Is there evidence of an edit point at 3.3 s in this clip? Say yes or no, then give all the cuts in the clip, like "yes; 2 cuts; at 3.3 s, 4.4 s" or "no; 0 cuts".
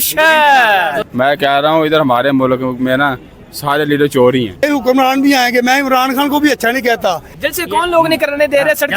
no; 3 cuts; at 1.0 s, 4.6 s, 7.3 s